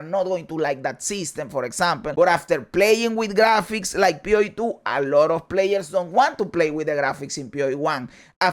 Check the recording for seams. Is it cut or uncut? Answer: cut